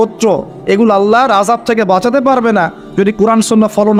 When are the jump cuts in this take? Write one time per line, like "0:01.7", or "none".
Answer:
none

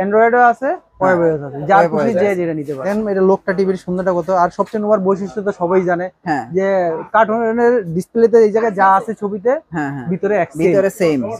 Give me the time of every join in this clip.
0:02.9

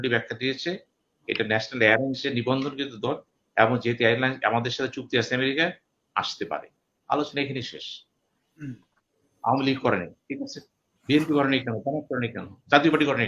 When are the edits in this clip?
0:08.6

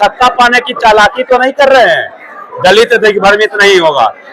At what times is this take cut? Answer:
none

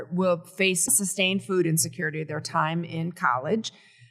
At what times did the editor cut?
0:00.9

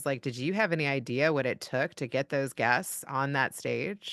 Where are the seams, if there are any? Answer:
none

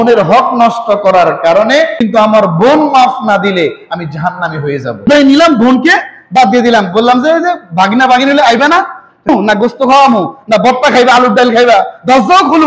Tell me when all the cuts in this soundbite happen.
0:02.0
0:05.1
0:09.3

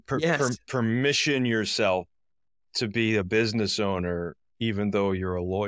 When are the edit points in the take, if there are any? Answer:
none

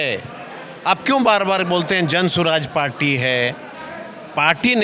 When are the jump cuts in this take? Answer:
none

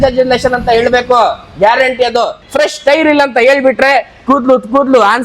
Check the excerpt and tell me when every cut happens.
0:02.4

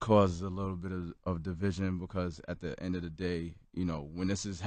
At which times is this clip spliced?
0:00.9

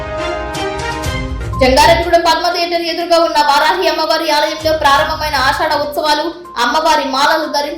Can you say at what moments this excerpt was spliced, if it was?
0:01.0

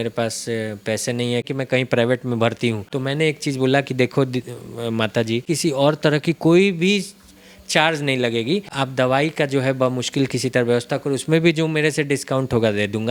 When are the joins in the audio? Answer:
0:01.4
0:02.9
0:05.4
0:08.7

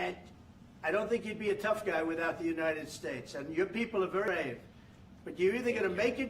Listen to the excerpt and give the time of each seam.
0:04.3

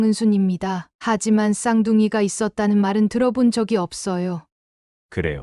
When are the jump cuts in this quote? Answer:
0:04.5

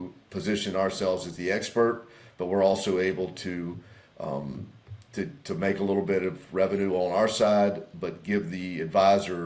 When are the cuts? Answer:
none

